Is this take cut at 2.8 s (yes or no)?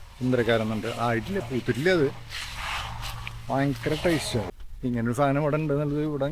no